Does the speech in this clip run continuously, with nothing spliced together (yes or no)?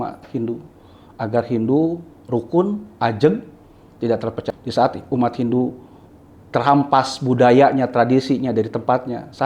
no